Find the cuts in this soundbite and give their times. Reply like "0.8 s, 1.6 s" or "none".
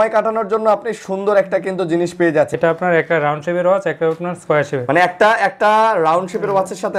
2.5 s